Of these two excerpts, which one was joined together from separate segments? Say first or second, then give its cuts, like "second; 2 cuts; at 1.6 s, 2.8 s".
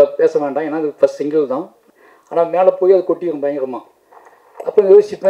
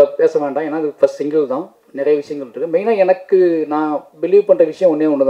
first; 1 cut; at 1.9 s